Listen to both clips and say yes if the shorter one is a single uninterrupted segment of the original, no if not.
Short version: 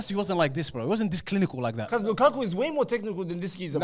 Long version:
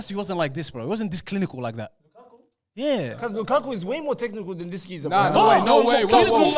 no